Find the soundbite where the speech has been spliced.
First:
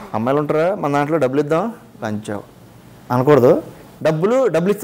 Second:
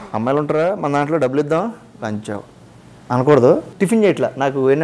second; 1 cut; at 3.7 s

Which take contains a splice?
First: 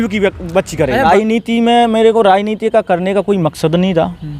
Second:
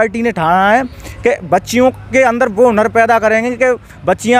first; 1 cut; at 1.0 s

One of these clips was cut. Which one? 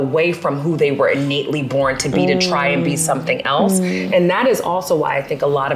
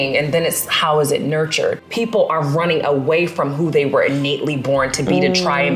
second; 1 cut; at 1.9 s

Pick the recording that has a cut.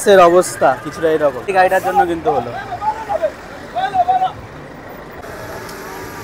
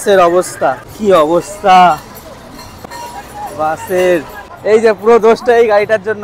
second; 3 cuts; at 0.9 s, 2.7 s, 4.4 s

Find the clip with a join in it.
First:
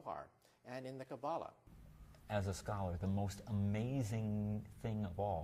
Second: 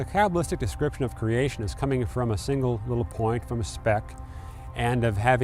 first; 1 cut; at 1.0 s

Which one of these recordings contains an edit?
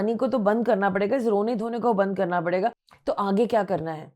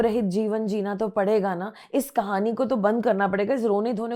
first; 1 cut; at 2.9 s

